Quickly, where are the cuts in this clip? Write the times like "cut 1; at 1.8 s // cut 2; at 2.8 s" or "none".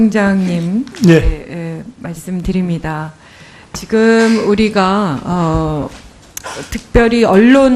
none